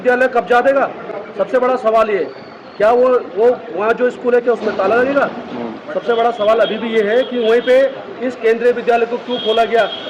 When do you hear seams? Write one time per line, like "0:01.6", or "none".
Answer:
none